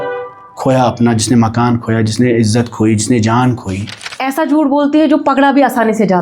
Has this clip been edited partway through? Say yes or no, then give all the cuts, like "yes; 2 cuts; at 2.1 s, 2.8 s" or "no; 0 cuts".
yes; 1 cut; at 4.2 s